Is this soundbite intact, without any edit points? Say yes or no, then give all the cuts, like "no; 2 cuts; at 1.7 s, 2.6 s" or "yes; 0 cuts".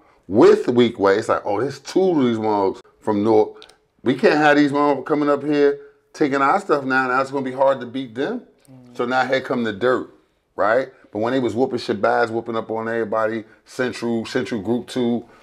no; 1 cut; at 2.9 s